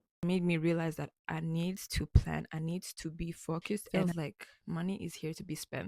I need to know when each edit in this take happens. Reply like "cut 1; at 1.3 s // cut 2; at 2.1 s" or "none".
cut 1; at 3.9 s